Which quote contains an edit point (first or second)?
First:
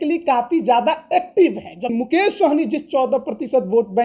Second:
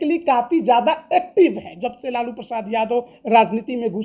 first